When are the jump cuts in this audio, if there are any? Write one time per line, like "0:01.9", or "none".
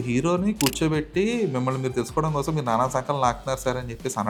none